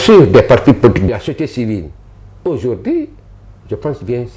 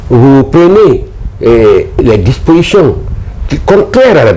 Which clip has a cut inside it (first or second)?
first